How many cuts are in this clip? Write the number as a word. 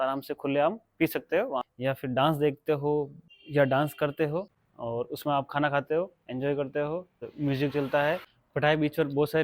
three